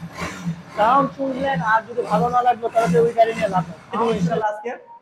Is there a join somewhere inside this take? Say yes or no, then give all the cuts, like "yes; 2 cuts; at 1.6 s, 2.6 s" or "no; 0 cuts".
yes; 1 cut; at 4.0 s